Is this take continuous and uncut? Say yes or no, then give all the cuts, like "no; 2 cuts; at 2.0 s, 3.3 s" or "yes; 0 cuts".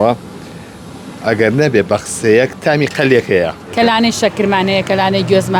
no; 1 cut; at 3.7 s